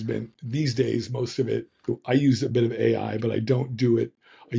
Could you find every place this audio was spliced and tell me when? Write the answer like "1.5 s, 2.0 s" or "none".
none